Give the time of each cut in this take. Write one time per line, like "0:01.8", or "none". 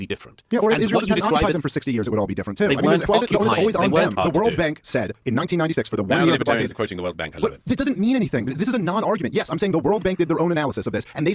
none